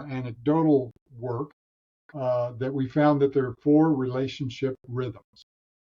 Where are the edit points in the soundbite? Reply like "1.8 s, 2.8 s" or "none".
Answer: none